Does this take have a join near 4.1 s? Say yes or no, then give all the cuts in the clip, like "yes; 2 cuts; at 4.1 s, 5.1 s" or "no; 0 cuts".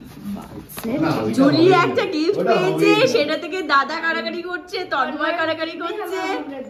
no; 1 cut; at 1.0 s